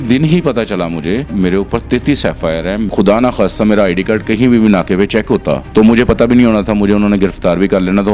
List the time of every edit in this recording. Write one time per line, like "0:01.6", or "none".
0:01.3
0:02.9
0:05.6